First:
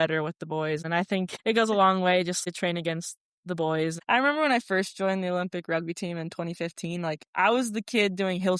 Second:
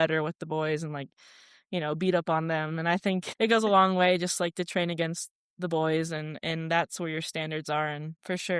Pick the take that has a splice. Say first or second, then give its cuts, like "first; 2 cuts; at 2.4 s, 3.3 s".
first; 3 cuts; at 1.2 s, 2.4 s, 4.0 s